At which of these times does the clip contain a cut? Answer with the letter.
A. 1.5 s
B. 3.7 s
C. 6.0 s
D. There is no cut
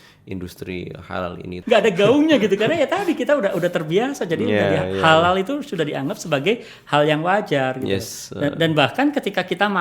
A